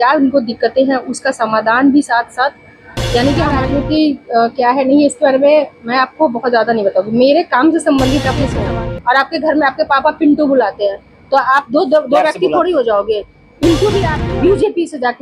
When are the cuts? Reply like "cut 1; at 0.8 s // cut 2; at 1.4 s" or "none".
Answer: cut 1; at 3.6 s // cut 2; at 8.6 s // cut 3; at 14.1 s

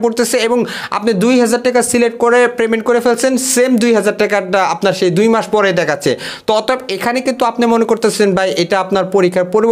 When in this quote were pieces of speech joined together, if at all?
none

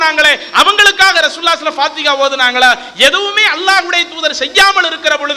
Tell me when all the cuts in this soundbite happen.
none

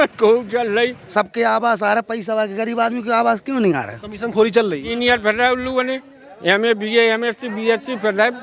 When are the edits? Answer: cut 1; at 1.0 s // cut 2; at 4.9 s

